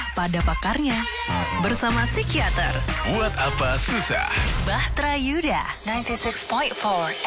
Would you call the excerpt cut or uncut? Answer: uncut